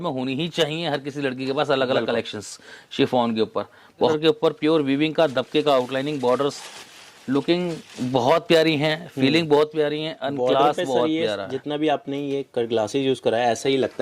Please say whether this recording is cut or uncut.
cut